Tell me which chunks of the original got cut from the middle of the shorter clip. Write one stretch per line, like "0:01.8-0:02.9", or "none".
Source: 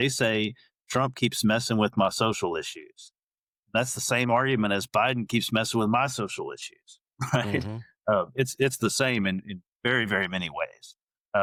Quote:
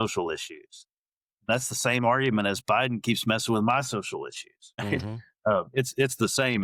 0:07.1-0:07.4